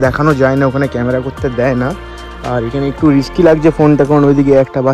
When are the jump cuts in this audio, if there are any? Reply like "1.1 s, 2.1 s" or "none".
none

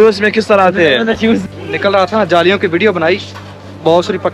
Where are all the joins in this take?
1.4 s

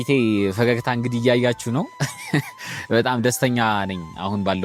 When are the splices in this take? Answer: none

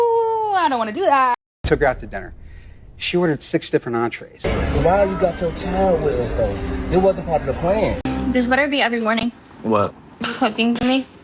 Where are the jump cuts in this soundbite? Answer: 1.5 s, 4.3 s, 8.0 s

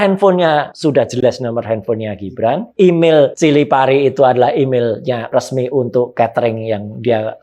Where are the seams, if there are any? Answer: 1.1 s, 2.7 s, 3.3 s, 5.3 s

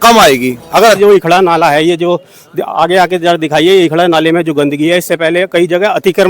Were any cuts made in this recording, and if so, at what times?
1.0 s

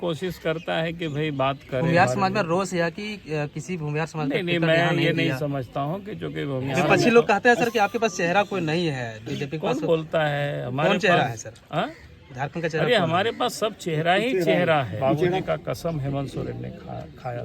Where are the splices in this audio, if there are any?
1.8 s, 6.9 s, 15.4 s

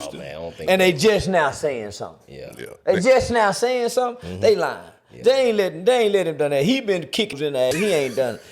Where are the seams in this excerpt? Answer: 7.6 s

